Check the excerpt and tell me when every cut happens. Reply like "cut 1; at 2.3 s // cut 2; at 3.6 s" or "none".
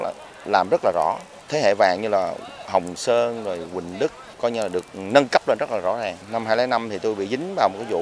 cut 1; at 1.3 s // cut 2; at 4.3 s // cut 3; at 6.2 s